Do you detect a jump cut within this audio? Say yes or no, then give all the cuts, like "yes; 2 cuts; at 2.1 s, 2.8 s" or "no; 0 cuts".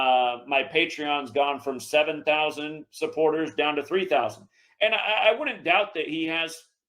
yes; 1 cut; at 4.6 s